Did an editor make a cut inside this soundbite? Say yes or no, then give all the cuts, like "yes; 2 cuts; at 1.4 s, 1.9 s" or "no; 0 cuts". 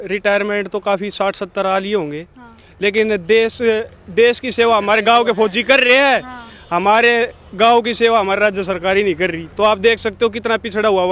no; 0 cuts